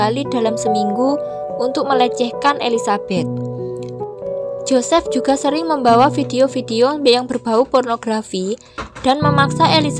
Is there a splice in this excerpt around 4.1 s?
yes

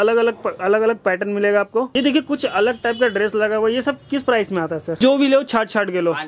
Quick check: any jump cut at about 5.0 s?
yes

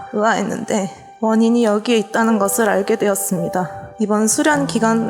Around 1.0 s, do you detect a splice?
yes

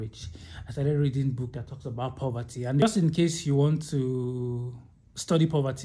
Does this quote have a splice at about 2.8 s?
yes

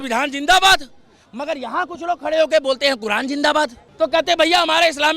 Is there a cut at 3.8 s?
yes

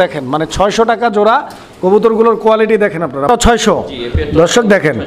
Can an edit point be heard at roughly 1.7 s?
no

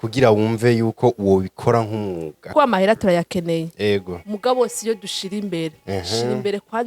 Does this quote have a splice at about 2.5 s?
yes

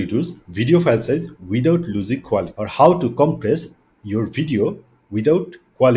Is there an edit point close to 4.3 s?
no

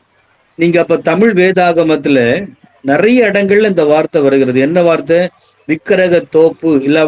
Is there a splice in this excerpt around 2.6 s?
no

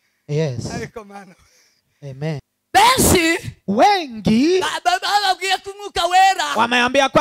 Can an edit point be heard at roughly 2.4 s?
yes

